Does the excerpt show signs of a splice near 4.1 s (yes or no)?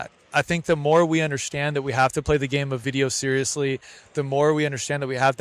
no